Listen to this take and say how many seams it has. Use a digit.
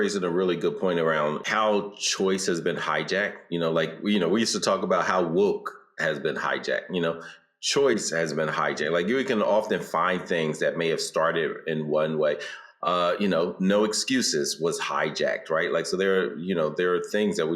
1